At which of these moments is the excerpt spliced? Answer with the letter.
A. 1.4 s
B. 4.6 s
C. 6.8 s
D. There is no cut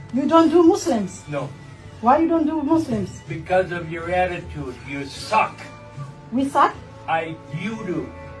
D